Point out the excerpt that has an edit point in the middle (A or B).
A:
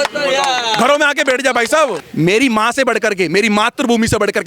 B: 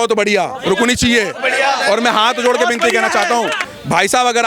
A